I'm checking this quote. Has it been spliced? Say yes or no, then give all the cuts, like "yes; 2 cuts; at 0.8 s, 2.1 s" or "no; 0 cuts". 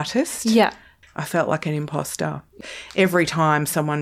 yes; 2 cuts; at 1.0 s, 2.5 s